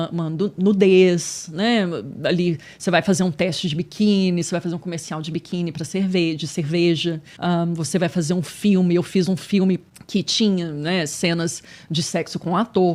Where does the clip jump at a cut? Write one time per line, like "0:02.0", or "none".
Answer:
0:07.3
0:09.9

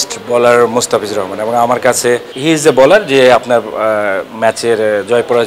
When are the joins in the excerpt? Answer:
0:02.3

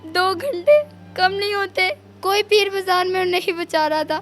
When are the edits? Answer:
0:02.1

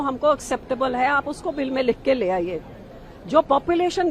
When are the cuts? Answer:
none

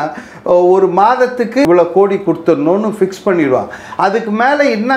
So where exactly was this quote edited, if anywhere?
0:01.7

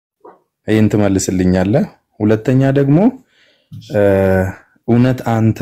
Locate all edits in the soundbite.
none

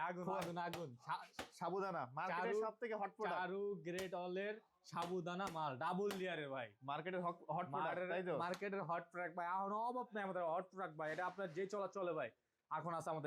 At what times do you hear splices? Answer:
none

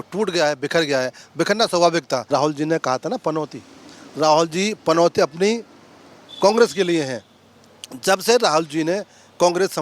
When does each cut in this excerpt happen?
0:02.2

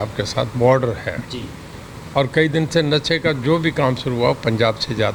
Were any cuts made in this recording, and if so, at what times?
none

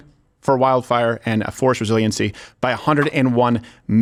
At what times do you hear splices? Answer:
none

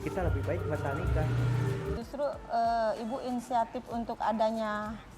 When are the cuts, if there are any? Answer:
0:02.0

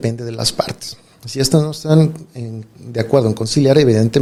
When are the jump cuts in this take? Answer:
none

